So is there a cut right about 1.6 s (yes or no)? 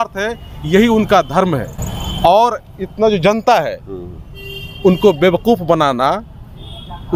no